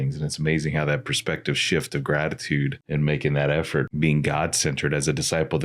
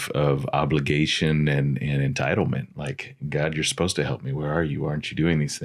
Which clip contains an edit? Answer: first; 2 cuts; at 2.8 s, 3.9 s

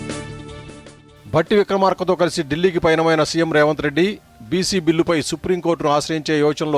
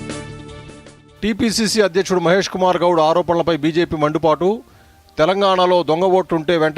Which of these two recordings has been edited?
second; 1 cut; at 1.0 s

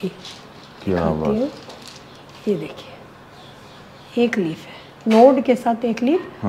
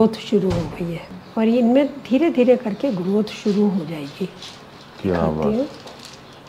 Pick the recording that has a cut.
second; 1 cut; at 1.2 s

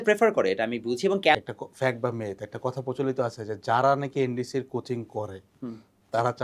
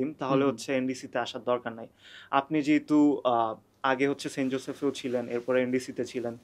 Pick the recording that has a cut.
first; 1 cut; at 1.3 s

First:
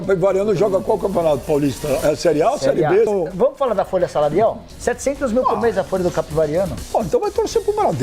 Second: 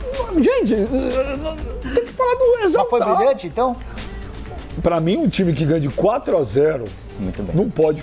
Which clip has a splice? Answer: first; 1 cut; at 3.1 s

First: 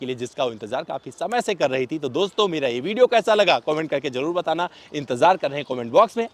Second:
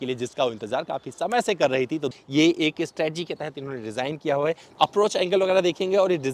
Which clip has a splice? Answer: second; 2 cuts; at 2.1 s, 4.7 s

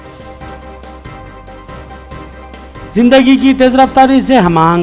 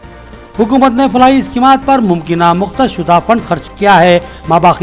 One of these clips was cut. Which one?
first; 1 cut; at 1.1 s

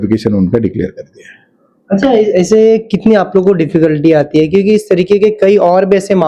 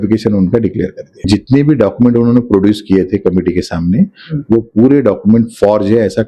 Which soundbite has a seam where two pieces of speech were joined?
second; 1 cut; at 1.2 s

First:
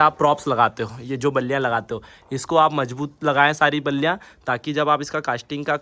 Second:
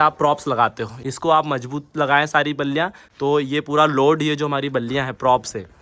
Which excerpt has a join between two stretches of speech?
second; 2 cuts; at 0.9 s, 3.0 s

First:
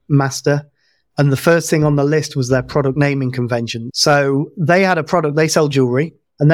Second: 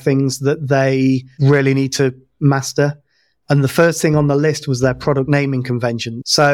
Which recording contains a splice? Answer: second; 1 cut; at 1.3 s

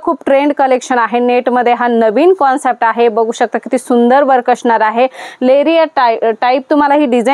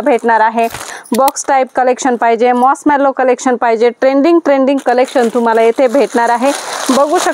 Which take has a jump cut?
second; 1 cut; at 0.9 s

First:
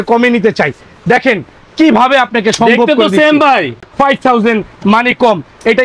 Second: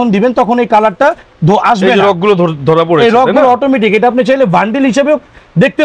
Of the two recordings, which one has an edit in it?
first; 1 cut; at 3.8 s

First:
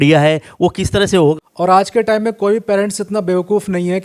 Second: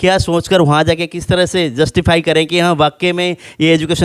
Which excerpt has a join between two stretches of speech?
first; 1 cut; at 1.5 s

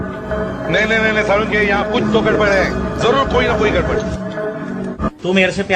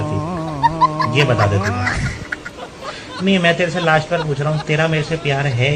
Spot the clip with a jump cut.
first; 1 cut; at 4.1 s

